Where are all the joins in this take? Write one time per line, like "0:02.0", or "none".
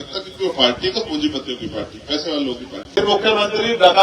0:03.0